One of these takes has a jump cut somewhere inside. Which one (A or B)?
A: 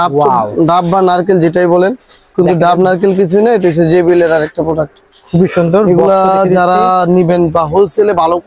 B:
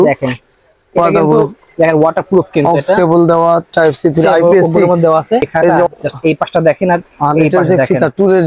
B